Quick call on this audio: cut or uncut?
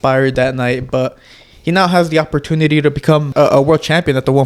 cut